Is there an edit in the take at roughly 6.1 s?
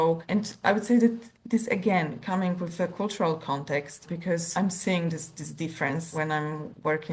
yes; 2 cuts; at 4.5 s, 6.1 s

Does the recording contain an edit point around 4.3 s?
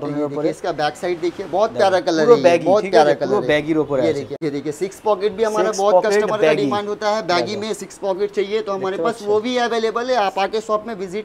yes; 1 cut; at 4.3 s

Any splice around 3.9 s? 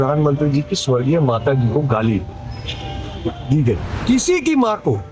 yes; 1 cut; at 3.9 s

